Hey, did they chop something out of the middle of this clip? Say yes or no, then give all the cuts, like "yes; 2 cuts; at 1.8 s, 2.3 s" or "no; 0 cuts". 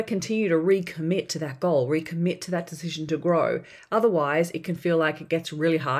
no; 0 cuts